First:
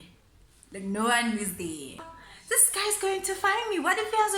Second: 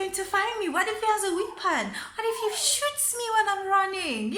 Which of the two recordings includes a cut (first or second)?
first